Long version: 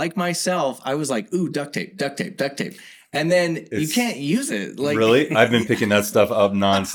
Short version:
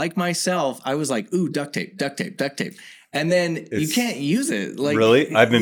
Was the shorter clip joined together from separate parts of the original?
no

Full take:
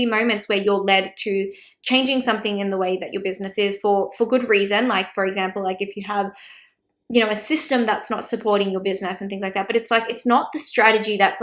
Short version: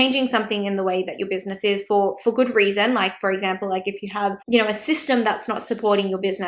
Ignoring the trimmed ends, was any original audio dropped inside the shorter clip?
yes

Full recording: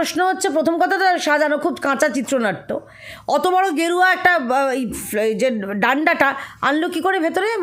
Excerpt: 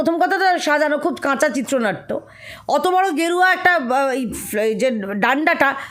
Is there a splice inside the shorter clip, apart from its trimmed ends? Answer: no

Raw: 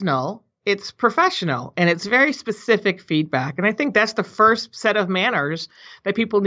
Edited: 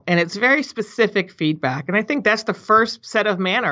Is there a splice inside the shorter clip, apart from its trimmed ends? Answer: no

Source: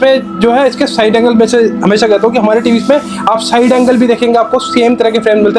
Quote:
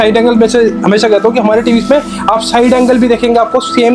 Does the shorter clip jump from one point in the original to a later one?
no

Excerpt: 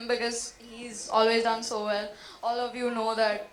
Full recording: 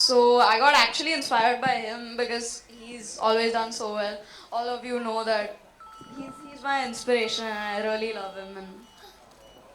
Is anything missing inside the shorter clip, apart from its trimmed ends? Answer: no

